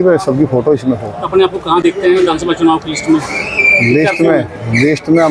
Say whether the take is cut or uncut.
uncut